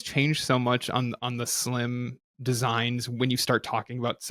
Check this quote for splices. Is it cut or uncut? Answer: uncut